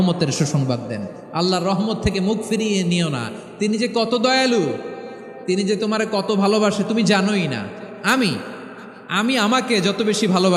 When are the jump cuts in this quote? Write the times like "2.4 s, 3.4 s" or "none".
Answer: none